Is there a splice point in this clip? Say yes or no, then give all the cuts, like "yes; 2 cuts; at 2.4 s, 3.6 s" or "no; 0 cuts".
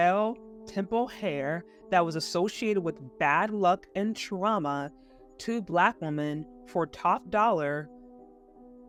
no; 0 cuts